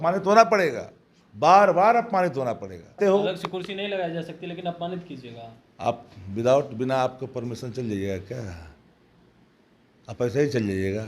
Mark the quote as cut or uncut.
cut